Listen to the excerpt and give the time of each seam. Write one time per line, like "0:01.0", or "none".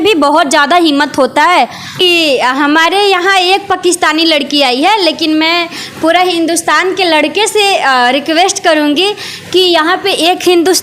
0:02.0